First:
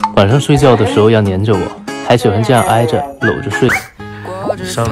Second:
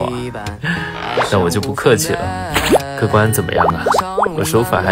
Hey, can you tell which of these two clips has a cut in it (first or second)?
first